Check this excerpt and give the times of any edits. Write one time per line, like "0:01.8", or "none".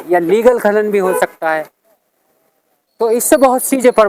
none